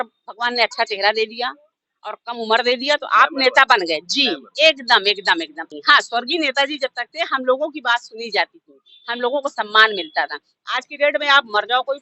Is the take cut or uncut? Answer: cut